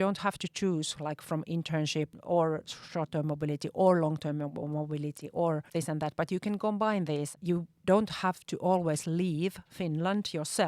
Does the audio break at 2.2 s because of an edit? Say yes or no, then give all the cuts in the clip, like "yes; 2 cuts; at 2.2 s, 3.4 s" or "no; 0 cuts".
yes; 3 cuts; at 2.2 s, 5.7 s, 7.3 s